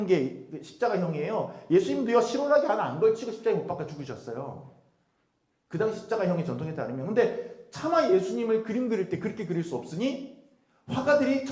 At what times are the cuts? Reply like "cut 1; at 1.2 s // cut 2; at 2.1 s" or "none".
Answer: none